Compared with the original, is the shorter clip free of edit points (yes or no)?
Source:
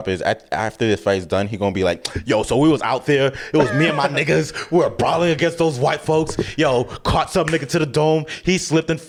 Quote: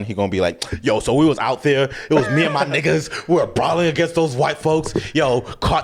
yes